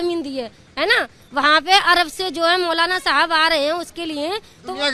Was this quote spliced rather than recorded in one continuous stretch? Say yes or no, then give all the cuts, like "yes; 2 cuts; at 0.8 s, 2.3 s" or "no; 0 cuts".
no; 0 cuts